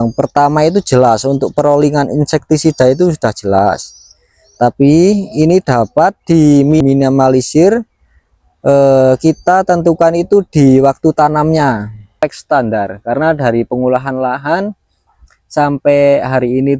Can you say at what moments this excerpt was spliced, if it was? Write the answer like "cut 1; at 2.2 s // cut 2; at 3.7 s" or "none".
cut 1; at 6.8 s // cut 2; at 12.2 s

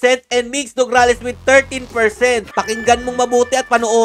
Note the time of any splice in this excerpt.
cut 1; at 2.5 s

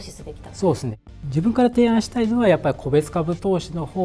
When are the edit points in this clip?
cut 1; at 1.0 s

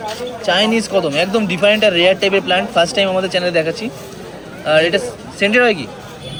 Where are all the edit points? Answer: none

